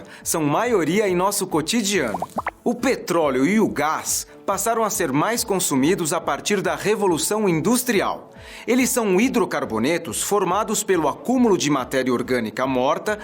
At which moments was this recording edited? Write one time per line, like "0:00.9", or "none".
0:02.5